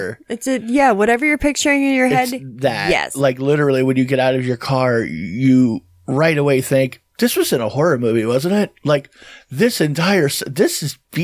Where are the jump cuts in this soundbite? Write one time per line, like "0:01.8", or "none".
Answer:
0:03.2